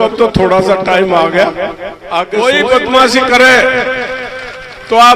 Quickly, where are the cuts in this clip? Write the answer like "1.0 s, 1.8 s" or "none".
2.3 s